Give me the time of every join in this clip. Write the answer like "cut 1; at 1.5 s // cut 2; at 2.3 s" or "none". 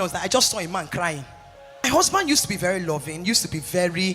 cut 1; at 1.8 s